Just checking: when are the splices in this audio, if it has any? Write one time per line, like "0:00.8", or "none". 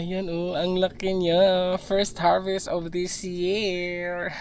none